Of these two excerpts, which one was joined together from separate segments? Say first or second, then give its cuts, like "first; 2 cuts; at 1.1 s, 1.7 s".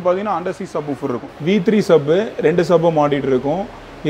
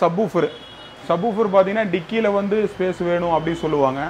first; 1 cut; at 1.3 s